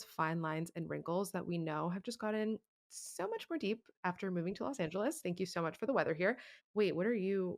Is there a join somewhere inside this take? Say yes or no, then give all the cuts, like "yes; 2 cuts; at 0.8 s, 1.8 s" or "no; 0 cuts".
yes; 1 cut; at 6.5 s